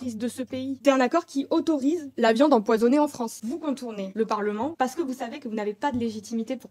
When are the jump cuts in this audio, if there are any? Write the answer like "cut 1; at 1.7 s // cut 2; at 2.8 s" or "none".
cut 1; at 0.8 s // cut 2; at 3.3 s